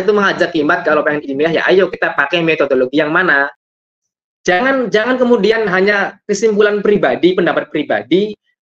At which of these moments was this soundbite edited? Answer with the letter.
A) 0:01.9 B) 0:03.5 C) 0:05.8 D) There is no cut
B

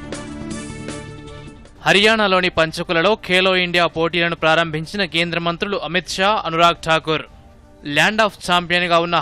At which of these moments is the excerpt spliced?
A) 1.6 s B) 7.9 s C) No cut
A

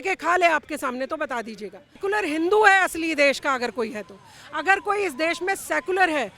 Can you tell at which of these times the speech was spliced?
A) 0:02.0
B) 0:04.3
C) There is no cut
A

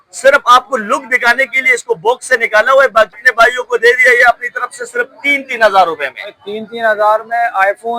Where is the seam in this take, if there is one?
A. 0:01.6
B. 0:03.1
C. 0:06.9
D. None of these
B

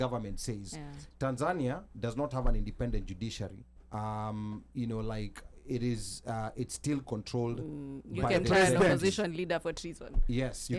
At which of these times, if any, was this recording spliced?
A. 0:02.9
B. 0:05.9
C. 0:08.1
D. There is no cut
D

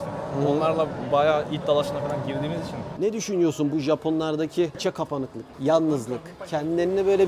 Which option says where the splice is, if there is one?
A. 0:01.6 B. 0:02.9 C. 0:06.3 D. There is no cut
B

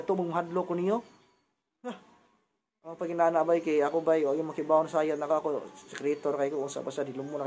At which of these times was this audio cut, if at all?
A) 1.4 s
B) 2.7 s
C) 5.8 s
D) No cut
D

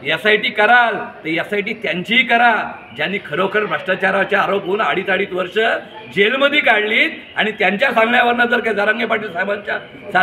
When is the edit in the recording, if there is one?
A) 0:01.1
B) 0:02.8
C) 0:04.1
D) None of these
D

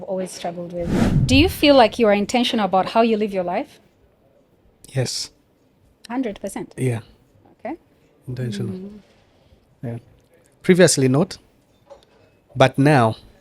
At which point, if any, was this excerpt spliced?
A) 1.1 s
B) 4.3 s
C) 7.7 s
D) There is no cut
A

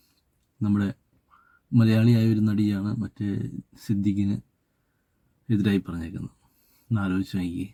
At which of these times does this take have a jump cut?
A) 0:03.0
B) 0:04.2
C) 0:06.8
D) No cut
D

